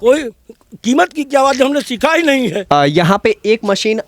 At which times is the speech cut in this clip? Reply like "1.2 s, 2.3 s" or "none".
2.6 s